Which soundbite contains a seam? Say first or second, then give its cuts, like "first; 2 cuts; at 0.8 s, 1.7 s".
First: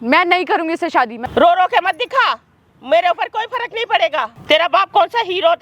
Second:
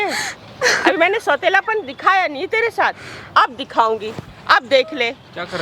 first; 2 cuts; at 1.2 s, 4.4 s